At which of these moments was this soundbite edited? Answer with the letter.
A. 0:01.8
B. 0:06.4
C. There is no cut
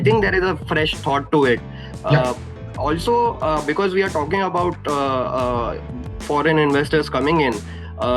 C